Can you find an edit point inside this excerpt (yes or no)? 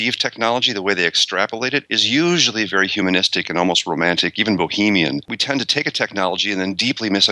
yes